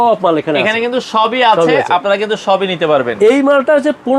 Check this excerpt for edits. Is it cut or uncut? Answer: uncut